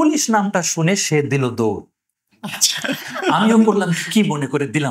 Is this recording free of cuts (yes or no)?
yes